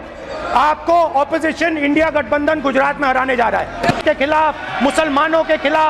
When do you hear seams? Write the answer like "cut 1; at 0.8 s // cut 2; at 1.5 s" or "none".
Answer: cut 1; at 4.0 s